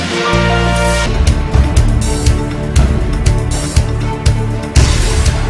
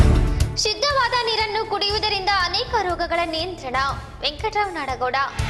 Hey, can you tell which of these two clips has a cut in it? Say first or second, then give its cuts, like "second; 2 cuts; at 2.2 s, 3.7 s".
first; 1 cut; at 0.9 s